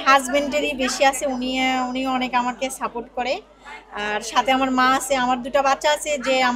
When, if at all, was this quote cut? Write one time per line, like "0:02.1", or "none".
none